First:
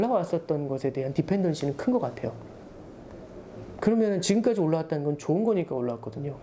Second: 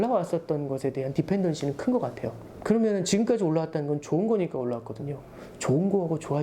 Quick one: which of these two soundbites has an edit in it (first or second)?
second